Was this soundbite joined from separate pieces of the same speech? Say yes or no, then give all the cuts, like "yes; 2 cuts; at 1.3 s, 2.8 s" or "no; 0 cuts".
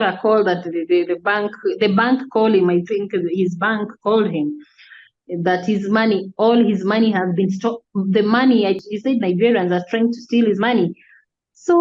yes; 1 cut; at 8.8 s